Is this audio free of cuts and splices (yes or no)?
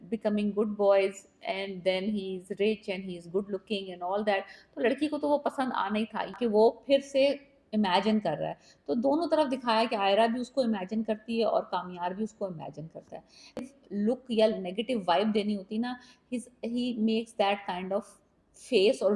no